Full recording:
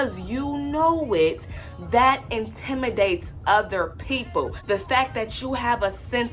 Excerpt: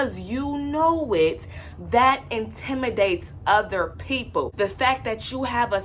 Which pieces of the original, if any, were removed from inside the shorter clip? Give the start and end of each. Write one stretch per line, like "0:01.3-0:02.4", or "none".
0:04.5-0:04.6